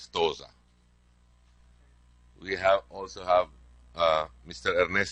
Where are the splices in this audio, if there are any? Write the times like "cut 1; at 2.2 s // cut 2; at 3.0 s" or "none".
none